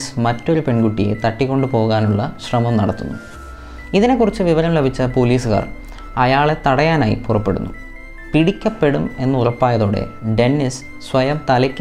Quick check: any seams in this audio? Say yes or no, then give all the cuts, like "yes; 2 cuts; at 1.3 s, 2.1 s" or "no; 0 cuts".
no; 0 cuts